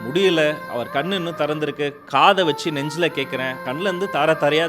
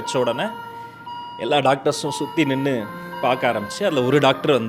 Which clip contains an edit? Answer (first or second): first